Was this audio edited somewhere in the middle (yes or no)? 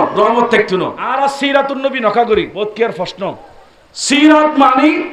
yes